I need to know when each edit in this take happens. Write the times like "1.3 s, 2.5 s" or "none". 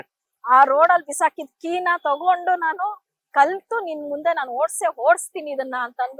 none